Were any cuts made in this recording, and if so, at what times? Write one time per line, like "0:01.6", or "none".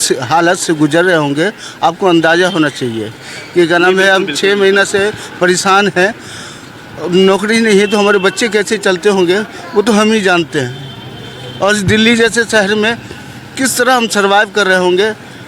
none